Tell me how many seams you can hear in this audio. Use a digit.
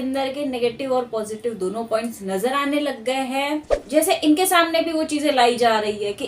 1